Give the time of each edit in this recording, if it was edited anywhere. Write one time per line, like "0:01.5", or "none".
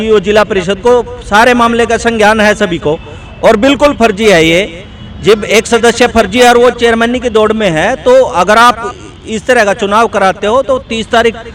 none

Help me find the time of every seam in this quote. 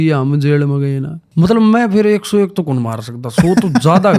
0:01.1

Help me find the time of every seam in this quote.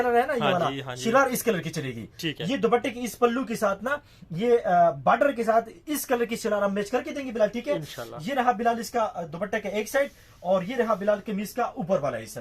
none

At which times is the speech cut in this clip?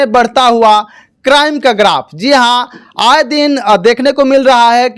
none

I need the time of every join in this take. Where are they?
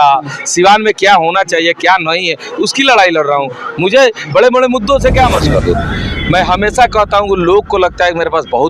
0:05.4

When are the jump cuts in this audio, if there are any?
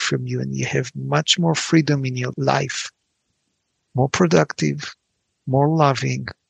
0:02.3

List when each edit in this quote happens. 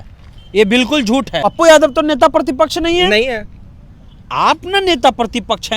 0:01.4

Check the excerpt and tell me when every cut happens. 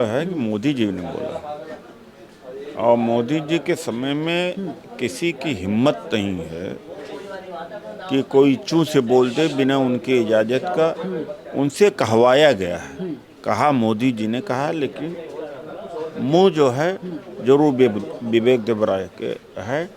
none

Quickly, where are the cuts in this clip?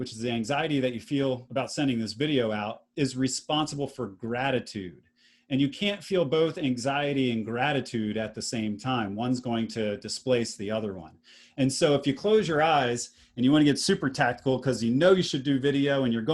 0:01.4

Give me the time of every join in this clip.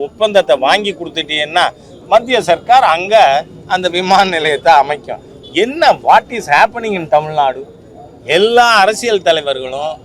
none

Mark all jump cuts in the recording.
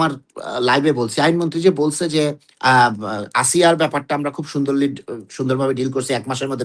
none

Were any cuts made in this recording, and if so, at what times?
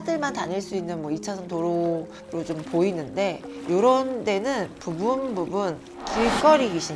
none

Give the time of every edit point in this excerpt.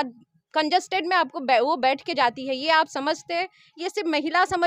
none

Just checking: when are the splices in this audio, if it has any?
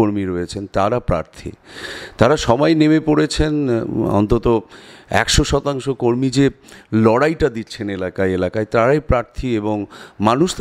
none

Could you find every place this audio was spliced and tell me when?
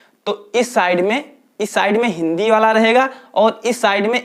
none

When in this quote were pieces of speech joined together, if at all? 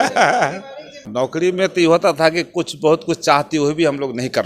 0:01.4

